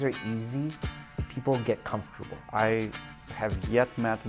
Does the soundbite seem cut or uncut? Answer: cut